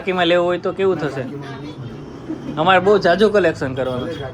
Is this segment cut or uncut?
uncut